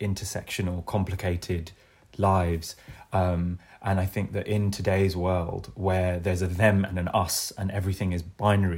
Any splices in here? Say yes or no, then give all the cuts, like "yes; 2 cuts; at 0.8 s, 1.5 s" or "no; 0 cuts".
no; 0 cuts